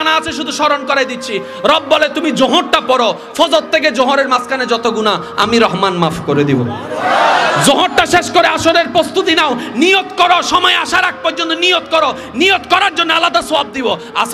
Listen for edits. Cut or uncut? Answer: uncut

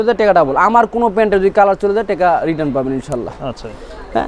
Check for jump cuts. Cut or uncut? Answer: uncut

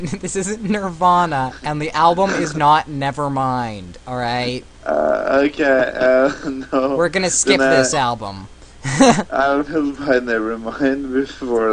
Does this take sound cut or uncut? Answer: uncut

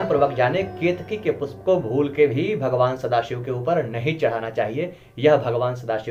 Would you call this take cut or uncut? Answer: uncut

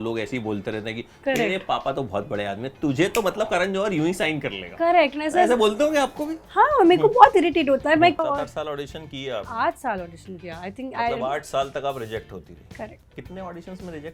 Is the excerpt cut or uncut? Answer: cut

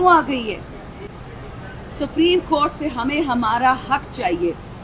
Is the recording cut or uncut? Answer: cut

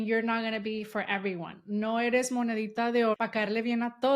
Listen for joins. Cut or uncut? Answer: cut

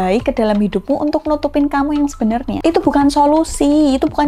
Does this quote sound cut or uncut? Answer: uncut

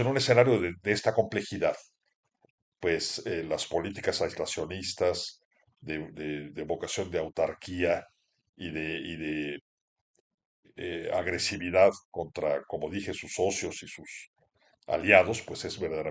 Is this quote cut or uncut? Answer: uncut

